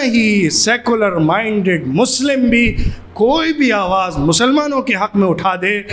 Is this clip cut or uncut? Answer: uncut